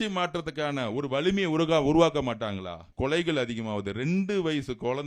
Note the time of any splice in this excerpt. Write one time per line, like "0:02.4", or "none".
0:02.8

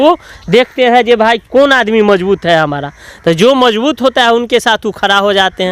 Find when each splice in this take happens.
none

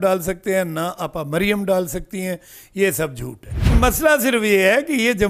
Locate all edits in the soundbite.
0:03.7

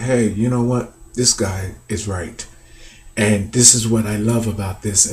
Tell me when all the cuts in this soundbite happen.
none

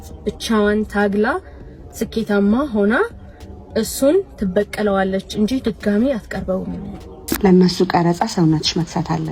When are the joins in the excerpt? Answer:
0:07.4

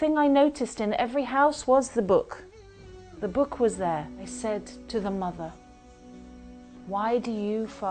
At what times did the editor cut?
0:04.2

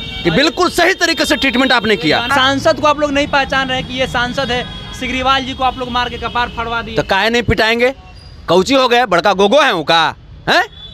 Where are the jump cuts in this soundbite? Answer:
0:02.3

